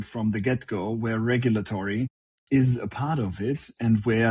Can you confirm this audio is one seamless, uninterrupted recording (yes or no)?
yes